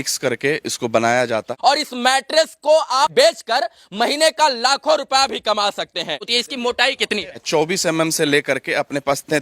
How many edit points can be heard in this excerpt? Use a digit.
4